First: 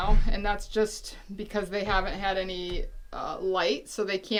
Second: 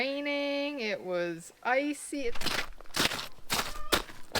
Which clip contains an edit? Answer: second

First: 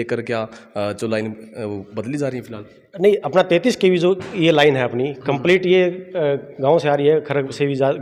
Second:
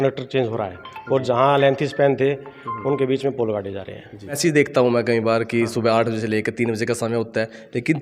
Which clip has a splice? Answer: second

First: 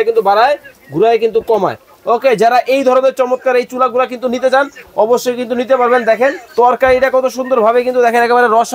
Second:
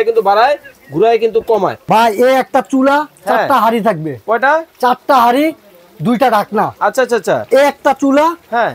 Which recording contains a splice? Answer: second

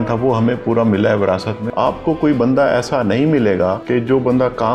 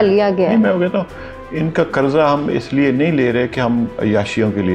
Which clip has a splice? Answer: first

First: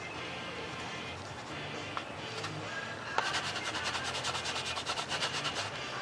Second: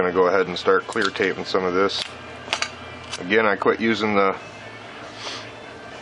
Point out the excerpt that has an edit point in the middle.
second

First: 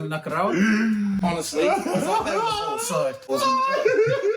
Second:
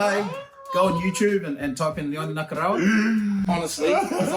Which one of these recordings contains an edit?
first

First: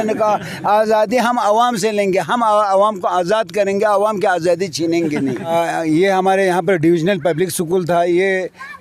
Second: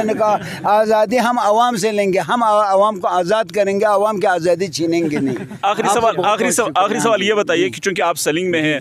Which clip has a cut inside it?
first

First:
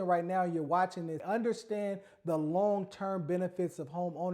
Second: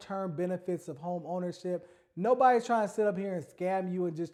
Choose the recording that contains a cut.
first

